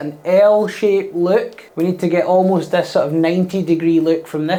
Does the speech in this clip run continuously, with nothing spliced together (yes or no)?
yes